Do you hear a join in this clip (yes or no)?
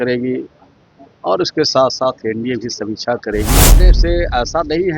yes